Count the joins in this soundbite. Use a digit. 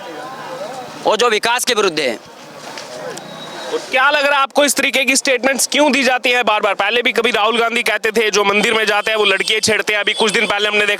0